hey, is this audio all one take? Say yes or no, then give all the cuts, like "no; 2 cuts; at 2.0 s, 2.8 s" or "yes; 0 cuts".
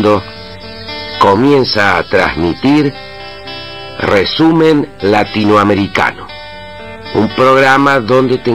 yes; 0 cuts